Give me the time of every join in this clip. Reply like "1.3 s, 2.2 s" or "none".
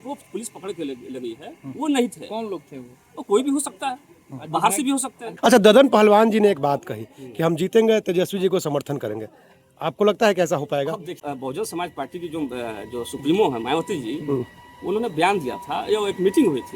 5.2 s, 11.2 s